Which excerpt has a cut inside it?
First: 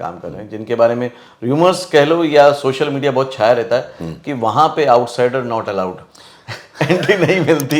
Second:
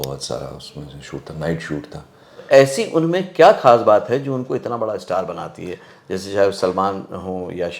second; 1 cut; at 2.4 s

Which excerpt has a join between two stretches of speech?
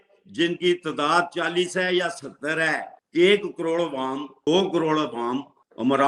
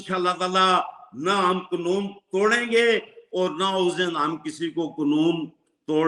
first; 1 cut; at 2.9 s

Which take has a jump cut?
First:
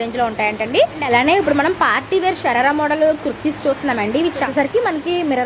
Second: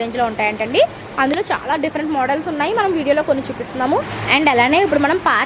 first; 2 cuts; at 1.0 s, 4.5 s

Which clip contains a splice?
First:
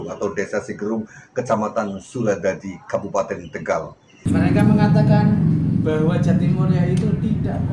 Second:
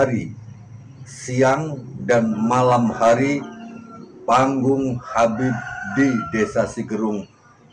first; 1 cut; at 4.3 s

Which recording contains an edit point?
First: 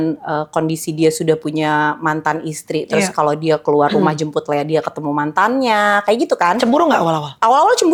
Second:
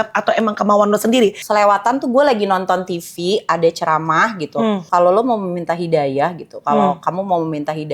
second; 2 cuts; at 1.4 s, 4.8 s

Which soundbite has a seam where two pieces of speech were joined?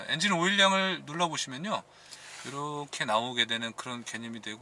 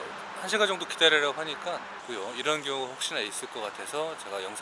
second; 1 cut; at 2.0 s

